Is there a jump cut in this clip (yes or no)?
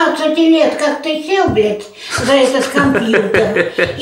no